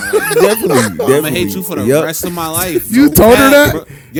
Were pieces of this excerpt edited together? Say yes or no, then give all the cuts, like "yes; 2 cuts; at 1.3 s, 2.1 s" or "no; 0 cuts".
no; 0 cuts